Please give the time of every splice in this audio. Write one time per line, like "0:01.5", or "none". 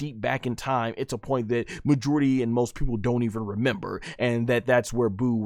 none